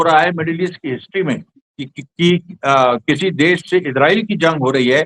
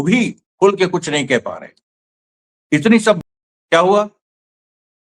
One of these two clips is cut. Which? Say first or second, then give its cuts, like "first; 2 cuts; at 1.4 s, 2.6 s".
second; 1 cut; at 3.2 s